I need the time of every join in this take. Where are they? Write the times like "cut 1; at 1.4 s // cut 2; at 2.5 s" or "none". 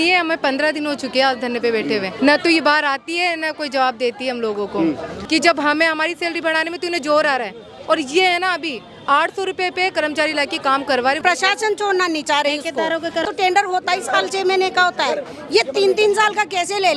cut 1; at 2.1 s // cut 2; at 5.1 s // cut 3; at 11.2 s // cut 4; at 13.2 s

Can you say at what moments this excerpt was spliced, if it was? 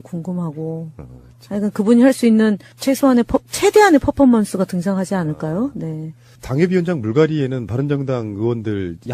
cut 1; at 2.7 s

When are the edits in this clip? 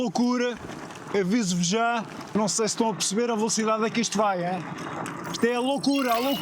cut 1; at 2.2 s

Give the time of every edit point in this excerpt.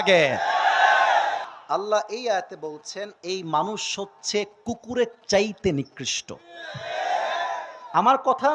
cut 1; at 1.4 s

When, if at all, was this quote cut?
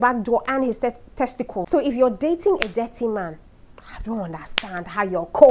cut 1; at 1.7 s

